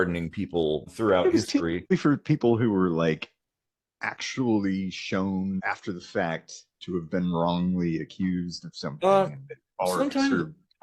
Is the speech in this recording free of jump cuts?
no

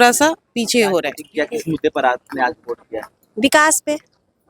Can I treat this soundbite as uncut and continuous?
no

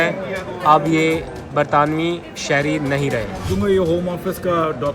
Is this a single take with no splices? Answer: no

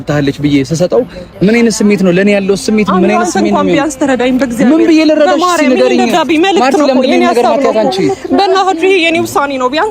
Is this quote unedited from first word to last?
yes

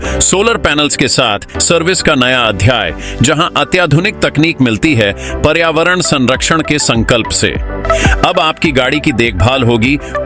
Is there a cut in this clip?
yes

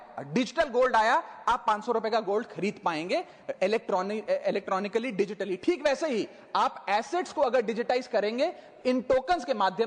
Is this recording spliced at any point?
no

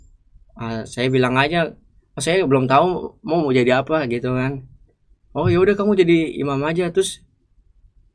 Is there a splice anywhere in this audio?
no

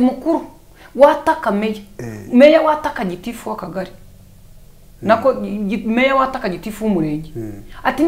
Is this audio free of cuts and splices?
yes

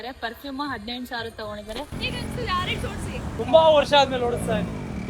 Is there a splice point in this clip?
yes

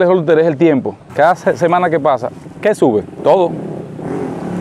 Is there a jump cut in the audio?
yes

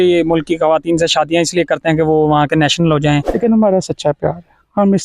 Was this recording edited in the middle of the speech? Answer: yes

